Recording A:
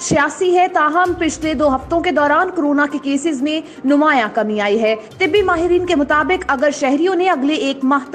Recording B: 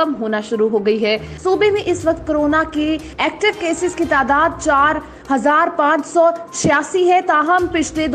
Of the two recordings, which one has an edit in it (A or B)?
B